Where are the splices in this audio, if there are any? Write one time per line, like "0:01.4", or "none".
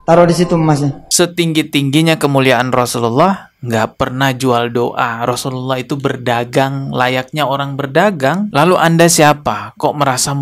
0:01.1
0:08.5